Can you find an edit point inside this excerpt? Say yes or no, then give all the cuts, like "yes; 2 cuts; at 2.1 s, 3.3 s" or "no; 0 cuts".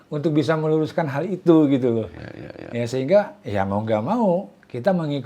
no; 0 cuts